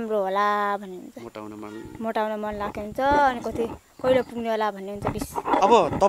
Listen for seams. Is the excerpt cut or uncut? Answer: uncut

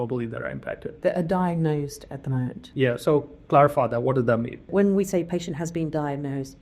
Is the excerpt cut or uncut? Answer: cut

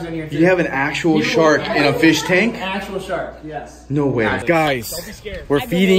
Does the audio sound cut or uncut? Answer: cut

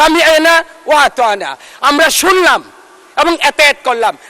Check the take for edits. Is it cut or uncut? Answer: uncut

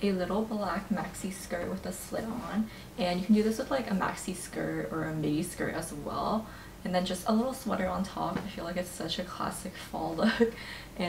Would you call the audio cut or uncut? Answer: uncut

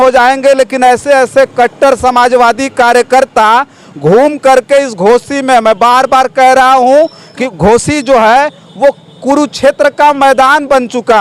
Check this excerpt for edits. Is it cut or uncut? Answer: cut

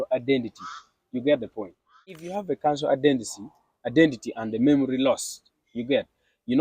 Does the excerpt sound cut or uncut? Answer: cut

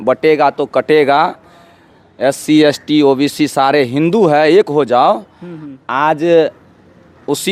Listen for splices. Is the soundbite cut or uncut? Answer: uncut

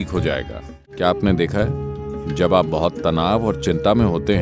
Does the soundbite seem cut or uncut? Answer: cut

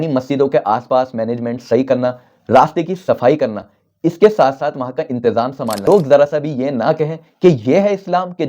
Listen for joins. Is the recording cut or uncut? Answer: cut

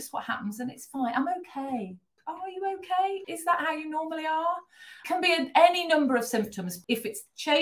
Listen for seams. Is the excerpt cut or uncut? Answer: cut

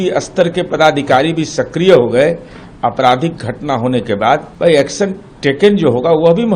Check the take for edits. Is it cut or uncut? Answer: cut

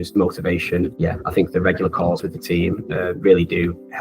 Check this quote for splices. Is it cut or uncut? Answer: uncut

